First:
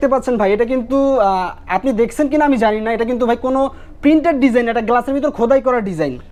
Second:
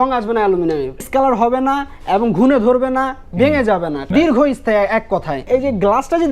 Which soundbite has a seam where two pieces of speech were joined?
second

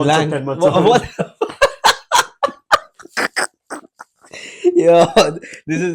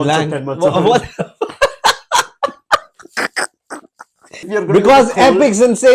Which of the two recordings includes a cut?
second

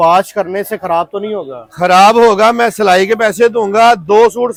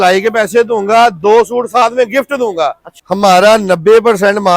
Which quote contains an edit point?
second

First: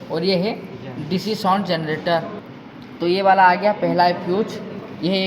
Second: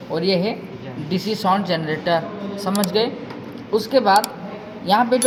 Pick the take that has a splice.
first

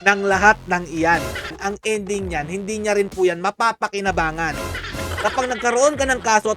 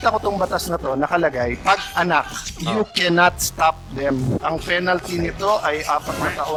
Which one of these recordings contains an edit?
first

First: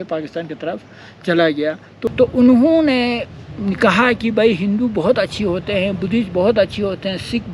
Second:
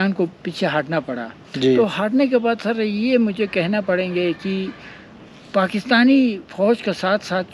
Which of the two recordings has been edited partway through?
first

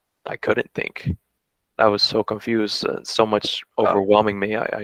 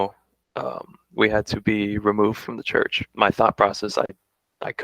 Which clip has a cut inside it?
second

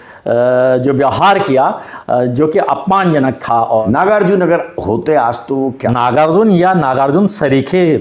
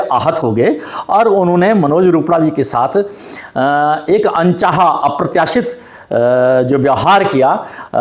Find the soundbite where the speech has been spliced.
first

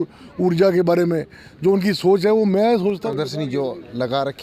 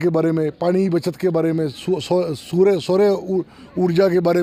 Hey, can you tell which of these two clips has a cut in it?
first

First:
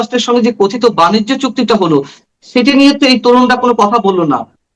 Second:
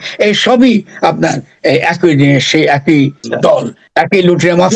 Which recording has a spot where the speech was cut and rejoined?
second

